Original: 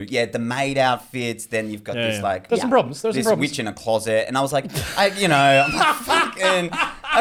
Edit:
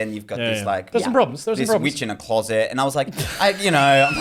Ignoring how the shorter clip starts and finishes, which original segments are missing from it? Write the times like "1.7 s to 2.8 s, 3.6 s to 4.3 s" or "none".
none